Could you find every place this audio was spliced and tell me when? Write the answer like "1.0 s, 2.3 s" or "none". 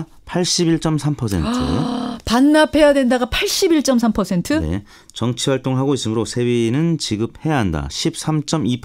7.4 s